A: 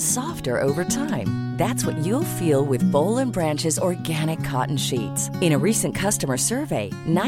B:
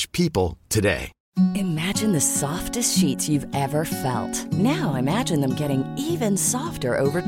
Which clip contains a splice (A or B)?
B